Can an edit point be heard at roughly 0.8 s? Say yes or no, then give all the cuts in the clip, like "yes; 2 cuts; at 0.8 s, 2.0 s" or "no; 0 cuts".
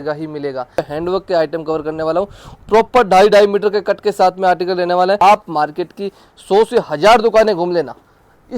yes; 2 cuts; at 0.8 s, 5.2 s